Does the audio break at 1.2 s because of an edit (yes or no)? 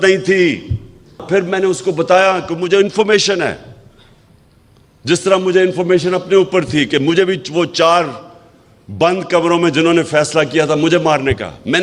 yes